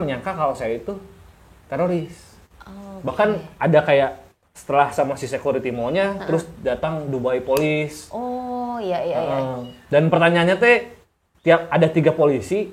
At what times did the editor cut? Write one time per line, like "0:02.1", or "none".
none